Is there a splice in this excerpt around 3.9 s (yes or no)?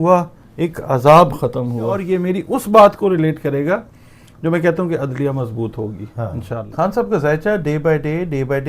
no